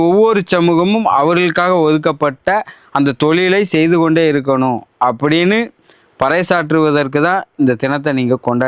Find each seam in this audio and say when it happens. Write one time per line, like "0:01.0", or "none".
none